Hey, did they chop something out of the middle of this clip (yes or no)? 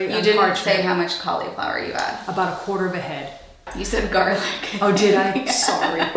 yes